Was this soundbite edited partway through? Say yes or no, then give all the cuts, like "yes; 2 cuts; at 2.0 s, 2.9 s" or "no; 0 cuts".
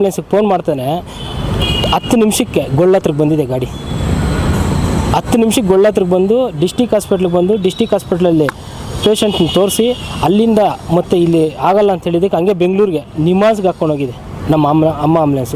no; 0 cuts